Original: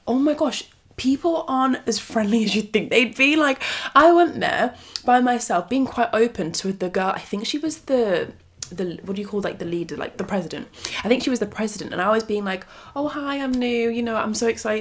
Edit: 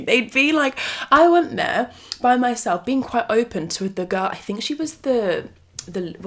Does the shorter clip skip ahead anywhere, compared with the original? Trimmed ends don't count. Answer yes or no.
no